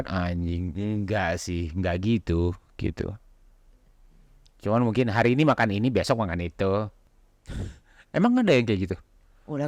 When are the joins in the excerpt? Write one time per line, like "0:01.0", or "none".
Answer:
0:07.0